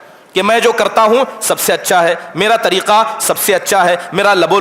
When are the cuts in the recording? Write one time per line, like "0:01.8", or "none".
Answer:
none